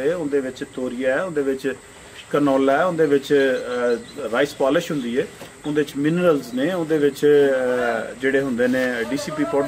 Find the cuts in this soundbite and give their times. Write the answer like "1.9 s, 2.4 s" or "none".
none